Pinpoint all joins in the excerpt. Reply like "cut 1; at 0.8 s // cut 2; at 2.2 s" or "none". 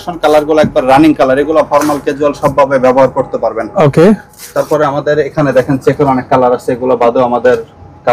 none